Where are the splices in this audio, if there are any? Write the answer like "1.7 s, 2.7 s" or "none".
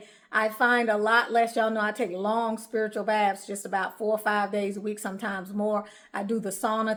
none